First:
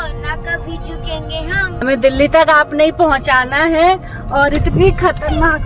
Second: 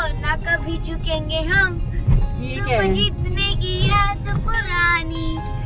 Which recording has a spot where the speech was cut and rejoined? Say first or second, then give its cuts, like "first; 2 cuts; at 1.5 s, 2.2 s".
first; 1 cut; at 1.8 s